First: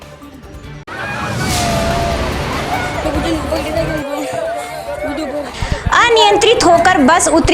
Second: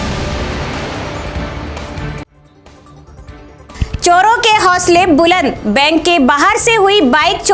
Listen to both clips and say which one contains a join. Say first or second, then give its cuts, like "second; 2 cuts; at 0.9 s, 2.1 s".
second; 1 cut; at 3.2 s